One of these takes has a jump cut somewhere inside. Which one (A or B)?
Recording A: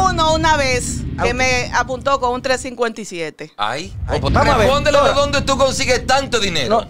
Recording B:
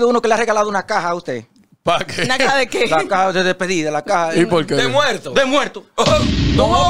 A